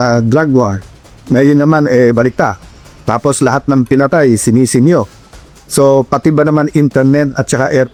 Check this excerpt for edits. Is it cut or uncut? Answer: uncut